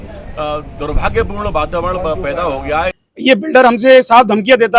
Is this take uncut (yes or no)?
no